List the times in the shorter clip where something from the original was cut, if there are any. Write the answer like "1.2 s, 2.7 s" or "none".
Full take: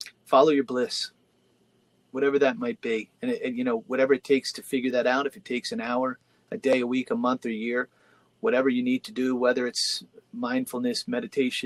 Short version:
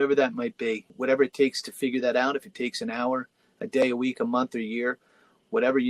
0.9 s